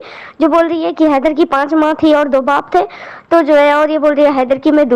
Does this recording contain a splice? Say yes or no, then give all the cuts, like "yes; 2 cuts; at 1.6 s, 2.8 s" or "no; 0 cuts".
no; 0 cuts